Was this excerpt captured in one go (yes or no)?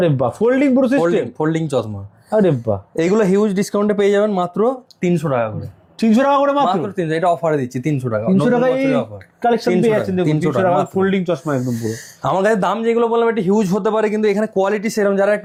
yes